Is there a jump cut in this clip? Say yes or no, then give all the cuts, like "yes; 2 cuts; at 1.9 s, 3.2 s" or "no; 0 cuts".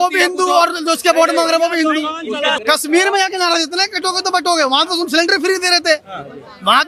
yes; 1 cut; at 2.6 s